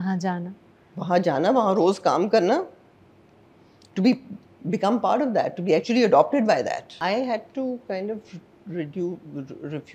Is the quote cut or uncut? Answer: cut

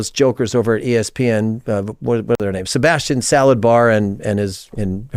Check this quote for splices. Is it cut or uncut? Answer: uncut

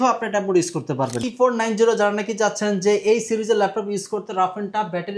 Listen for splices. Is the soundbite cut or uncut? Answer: cut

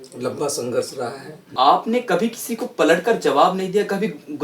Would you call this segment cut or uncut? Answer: cut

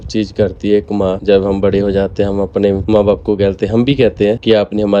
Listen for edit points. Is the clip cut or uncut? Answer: uncut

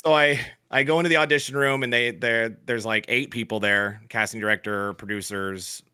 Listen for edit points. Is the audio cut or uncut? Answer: uncut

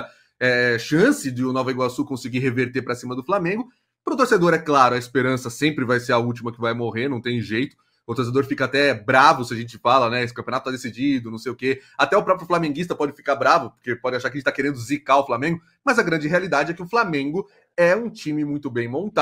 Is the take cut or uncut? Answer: uncut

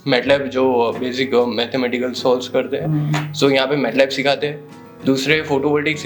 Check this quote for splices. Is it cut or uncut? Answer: uncut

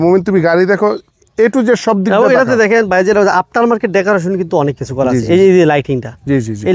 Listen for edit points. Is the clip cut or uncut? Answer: uncut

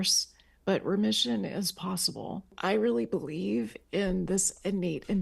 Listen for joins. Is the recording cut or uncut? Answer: cut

